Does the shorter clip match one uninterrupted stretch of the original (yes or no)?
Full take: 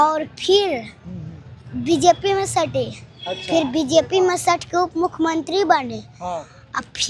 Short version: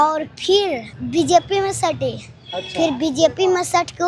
no